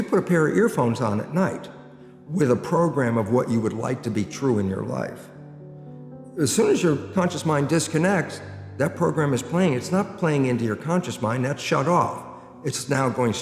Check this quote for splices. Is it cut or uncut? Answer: uncut